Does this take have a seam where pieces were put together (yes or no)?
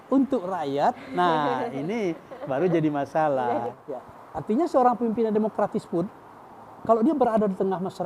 yes